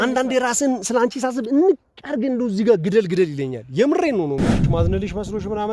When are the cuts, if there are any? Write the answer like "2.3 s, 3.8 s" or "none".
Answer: 4.6 s

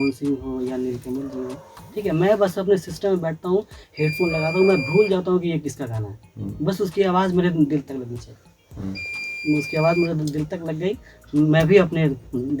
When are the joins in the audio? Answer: none

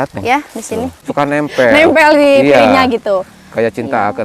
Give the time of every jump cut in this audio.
1.0 s

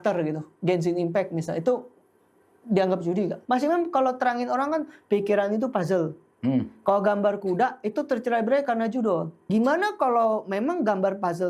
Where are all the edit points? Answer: 3.4 s, 9.4 s

